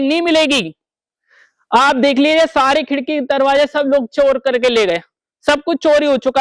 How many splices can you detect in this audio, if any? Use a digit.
0